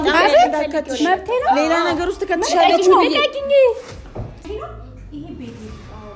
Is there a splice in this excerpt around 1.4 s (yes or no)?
no